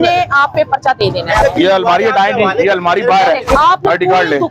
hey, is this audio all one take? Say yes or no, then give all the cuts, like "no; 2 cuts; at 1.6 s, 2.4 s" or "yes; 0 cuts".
no; 2 cuts; at 1.4 s, 3.6 s